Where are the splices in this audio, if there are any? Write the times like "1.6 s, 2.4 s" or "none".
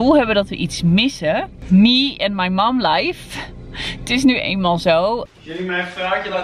1.4 s, 5.2 s

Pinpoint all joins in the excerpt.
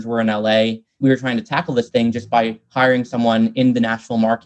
1.0 s

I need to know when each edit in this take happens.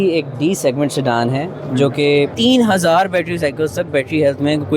2.3 s

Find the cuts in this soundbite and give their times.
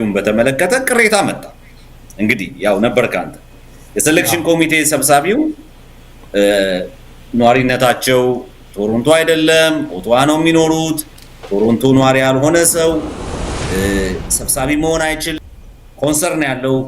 15.3 s

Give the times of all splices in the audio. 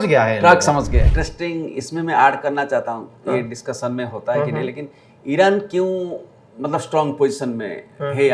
1.2 s

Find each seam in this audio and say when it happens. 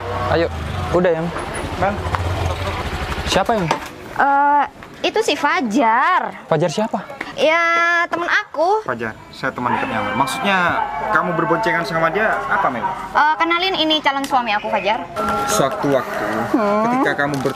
2.8 s, 6.4 s, 7.2 s, 8.8 s, 15.1 s

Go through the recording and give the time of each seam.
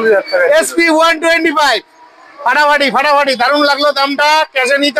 none

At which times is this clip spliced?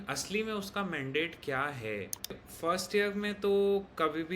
2.4 s

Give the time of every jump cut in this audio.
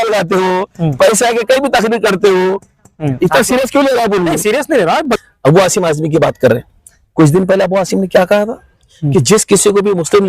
5.0 s

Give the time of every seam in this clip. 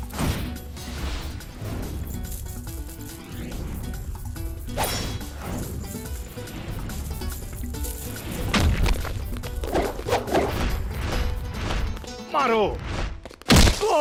none

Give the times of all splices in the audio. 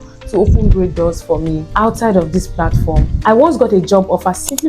1.6 s, 3.1 s

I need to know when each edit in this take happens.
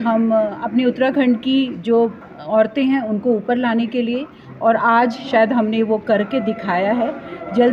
none

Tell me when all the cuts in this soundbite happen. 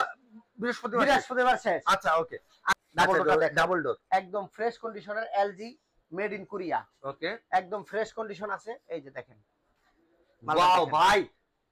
2.8 s

